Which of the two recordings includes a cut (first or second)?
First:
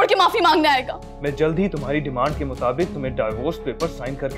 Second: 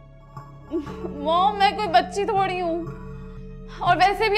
first